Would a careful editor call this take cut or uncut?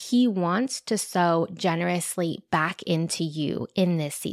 uncut